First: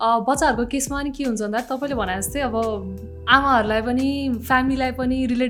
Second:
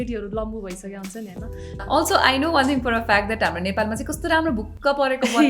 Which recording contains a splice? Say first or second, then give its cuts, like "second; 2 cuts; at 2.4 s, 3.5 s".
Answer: second; 1 cut; at 1.7 s